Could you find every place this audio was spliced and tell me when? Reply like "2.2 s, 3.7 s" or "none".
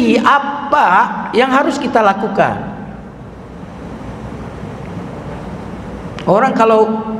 none